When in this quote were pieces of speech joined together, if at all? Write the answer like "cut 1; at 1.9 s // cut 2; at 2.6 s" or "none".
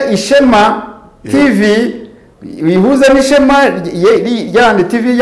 none

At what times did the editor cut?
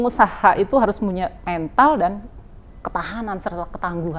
none

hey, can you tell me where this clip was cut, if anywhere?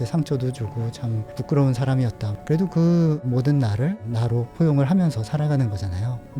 cut 1; at 2.3 s // cut 2; at 4.0 s

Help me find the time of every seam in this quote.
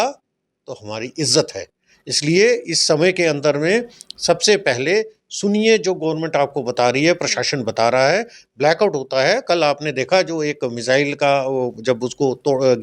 none

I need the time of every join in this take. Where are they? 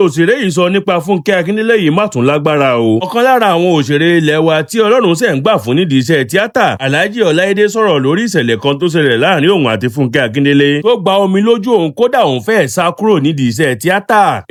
none

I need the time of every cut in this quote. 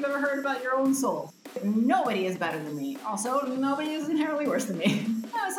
cut 1; at 1.3 s

